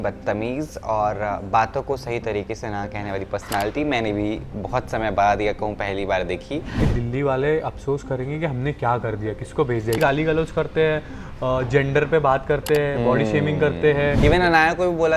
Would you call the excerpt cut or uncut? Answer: cut